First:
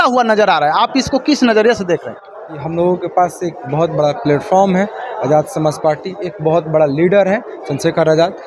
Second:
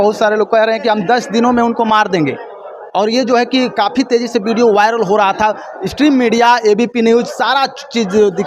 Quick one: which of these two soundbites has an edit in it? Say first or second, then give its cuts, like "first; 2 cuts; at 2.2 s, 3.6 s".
first; 1 cut; at 2.6 s